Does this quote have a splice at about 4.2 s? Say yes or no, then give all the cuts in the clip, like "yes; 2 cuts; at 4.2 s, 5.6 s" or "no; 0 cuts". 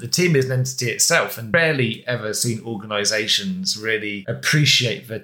yes; 2 cuts; at 1.5 s, 4.2 s